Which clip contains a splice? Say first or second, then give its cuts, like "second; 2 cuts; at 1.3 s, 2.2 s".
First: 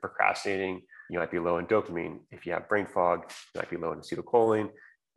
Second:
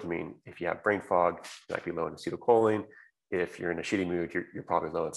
first; 1 cut; at 0.9 s